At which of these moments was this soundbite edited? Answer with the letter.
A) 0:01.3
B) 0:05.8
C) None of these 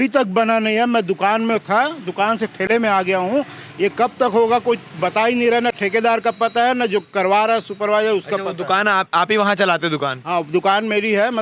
C